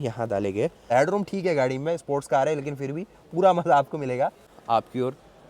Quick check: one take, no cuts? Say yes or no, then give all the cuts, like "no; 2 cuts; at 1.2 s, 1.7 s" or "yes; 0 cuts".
no; 2 cuts; at 0.9 s, 4.5 s